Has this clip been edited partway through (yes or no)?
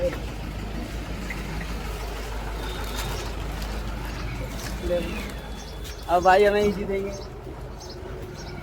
no